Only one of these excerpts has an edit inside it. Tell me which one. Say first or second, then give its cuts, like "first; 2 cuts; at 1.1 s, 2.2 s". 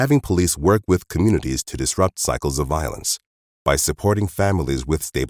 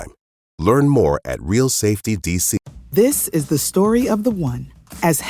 second; 1 cut; at 2.7 s